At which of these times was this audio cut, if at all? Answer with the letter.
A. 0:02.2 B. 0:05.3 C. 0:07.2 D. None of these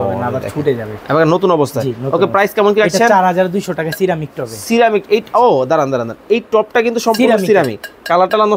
D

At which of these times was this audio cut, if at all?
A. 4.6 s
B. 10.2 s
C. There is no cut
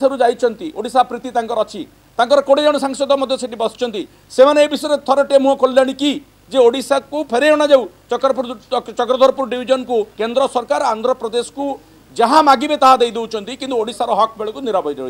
B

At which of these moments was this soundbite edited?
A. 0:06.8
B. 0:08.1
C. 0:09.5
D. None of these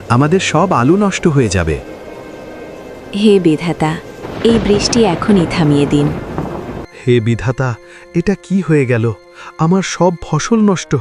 A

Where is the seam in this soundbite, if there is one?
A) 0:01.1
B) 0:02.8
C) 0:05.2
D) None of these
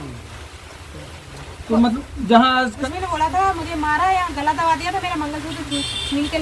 B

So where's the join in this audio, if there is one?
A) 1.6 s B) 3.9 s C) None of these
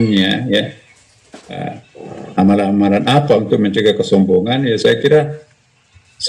A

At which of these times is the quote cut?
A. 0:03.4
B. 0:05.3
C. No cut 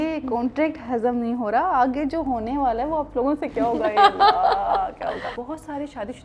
B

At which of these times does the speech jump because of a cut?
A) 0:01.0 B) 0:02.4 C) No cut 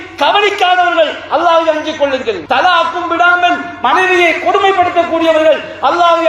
B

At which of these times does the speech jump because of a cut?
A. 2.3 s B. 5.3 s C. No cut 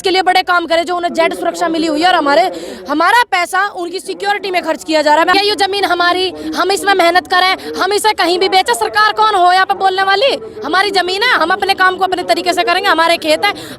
B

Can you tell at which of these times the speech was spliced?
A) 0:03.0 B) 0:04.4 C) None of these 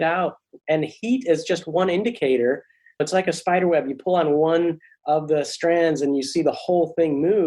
A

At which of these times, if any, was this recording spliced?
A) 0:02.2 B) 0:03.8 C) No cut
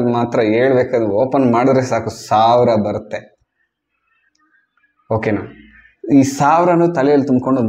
C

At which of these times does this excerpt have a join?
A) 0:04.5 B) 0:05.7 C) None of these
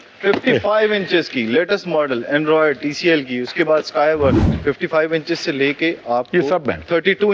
A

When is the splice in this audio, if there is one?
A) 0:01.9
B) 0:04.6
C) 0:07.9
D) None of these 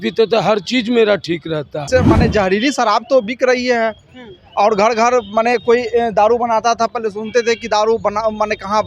A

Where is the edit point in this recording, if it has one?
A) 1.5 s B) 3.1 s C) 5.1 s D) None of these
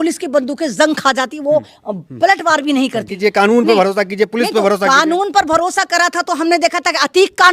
B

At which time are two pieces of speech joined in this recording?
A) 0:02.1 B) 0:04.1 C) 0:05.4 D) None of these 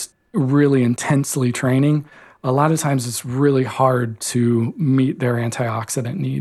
D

